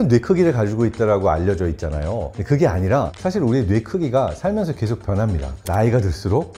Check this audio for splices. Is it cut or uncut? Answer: uncut